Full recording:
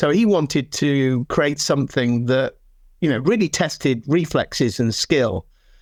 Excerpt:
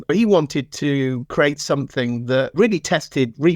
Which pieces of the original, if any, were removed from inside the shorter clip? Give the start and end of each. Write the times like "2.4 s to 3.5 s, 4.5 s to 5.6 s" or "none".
2.5 s to 3.2 s